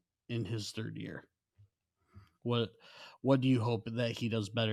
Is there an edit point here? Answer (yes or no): no